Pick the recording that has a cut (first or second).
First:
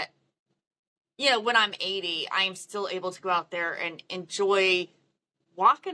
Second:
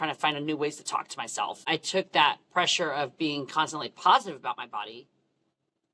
second